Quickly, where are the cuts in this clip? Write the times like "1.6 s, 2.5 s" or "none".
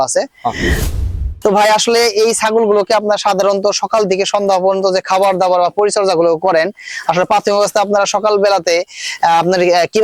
0.9 s